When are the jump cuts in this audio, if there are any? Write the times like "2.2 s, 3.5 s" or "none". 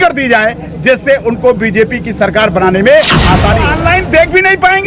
3.7 s